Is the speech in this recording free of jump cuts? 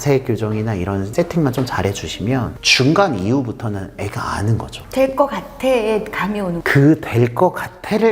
no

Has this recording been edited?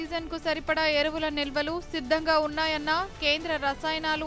no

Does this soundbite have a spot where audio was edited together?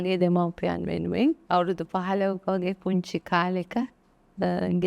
yes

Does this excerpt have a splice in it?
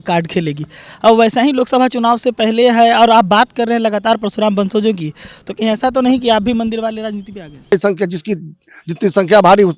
yes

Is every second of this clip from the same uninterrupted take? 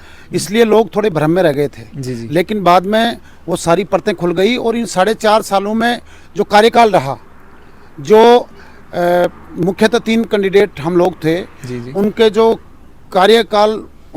yes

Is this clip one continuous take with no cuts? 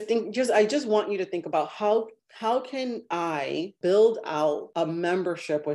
no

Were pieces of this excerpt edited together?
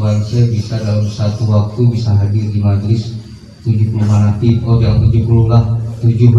no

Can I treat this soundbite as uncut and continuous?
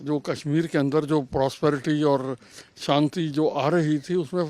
yes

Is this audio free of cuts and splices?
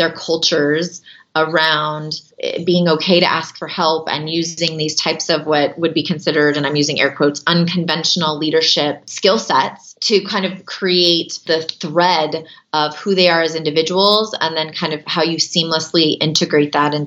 no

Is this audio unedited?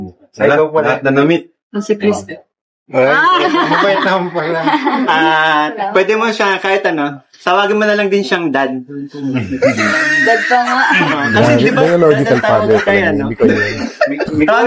yes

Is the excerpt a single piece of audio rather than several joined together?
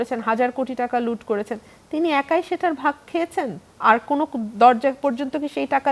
yes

